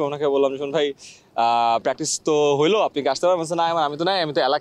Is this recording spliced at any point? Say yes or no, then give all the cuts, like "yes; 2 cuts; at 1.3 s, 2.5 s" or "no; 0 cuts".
no; 0 cuts